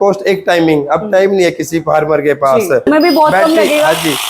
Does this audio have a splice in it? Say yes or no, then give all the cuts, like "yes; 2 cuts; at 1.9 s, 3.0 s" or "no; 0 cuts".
yes; 1 cut; at 2.9 s